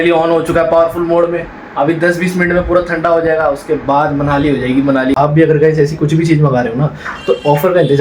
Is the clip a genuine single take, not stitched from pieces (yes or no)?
no